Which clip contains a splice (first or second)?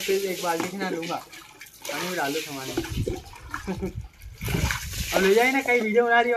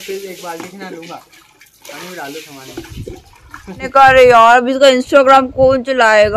second